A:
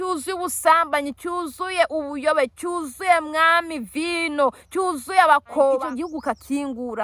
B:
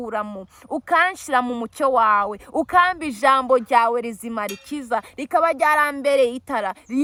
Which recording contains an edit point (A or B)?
A